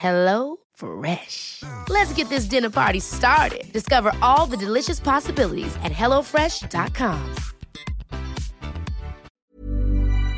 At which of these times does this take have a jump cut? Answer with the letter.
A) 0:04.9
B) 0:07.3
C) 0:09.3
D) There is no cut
C